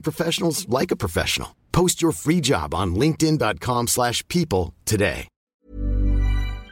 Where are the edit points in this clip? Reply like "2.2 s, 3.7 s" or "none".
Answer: 5.6 s